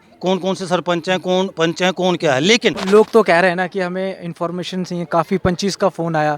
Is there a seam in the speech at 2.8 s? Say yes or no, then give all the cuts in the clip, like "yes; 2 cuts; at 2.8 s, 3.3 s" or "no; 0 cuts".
yes; 1 cut; at 2.8 s